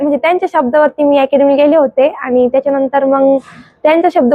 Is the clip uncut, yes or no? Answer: yes